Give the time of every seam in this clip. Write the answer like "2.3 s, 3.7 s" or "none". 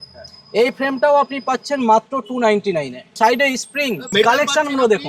3.2 s, 4.1 s